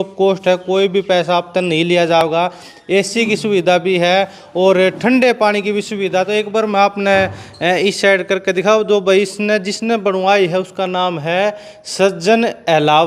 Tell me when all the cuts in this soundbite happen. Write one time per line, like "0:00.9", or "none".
none